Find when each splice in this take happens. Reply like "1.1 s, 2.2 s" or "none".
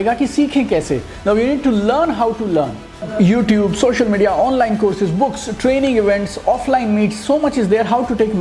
3.0 s